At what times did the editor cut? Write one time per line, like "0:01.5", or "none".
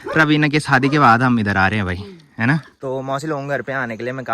0:02.7